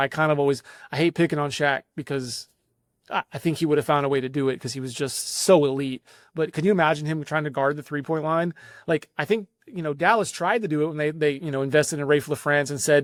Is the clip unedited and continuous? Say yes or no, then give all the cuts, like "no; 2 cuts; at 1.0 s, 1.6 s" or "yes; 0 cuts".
yes; 0 cuts